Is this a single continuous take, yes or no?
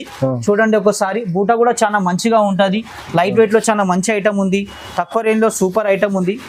yes